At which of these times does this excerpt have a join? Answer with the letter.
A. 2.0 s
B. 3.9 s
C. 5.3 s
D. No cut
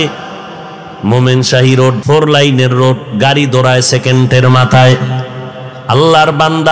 A